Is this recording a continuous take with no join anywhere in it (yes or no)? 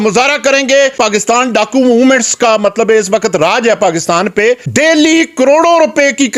no